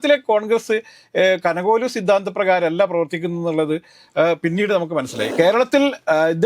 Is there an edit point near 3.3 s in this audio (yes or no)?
no